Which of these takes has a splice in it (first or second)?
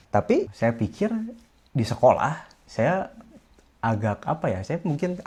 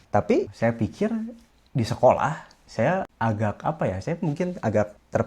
second